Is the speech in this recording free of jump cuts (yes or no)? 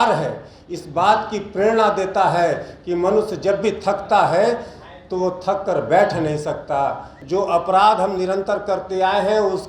no